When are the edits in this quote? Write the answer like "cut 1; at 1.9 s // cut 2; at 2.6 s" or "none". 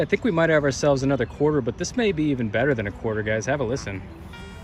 none